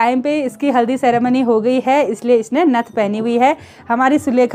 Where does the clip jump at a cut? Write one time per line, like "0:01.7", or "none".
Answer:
none